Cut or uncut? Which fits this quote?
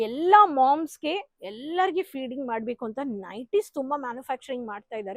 uncut